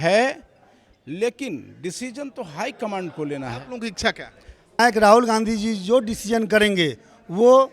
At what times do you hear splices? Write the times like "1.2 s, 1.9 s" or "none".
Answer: 4.8 s

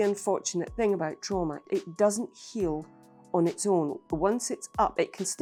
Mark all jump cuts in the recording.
none

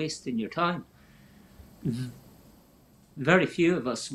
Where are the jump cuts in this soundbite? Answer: 3.1 s

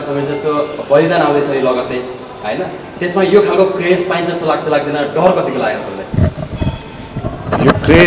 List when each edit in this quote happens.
none

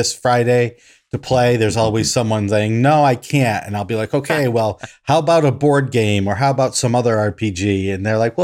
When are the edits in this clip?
none

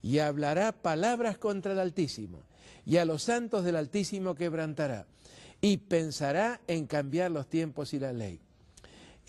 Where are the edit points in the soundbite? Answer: 1.5 s

